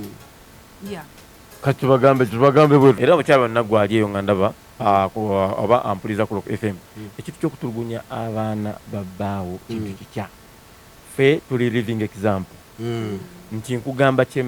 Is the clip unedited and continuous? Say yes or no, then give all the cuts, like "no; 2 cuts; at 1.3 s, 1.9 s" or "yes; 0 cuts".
no; 1 cut; at 3.0 s